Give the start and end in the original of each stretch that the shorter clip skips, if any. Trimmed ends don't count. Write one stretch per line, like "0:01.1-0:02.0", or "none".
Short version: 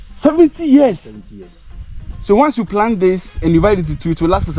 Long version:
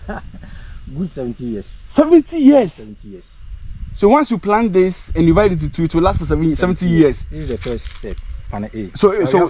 none